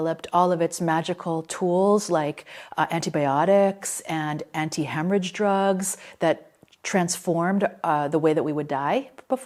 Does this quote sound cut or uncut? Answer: uncut